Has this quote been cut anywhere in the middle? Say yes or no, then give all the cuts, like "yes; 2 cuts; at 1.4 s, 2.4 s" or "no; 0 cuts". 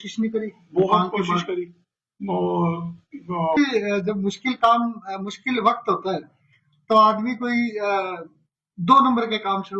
yes; 1 cut; at 3.6 s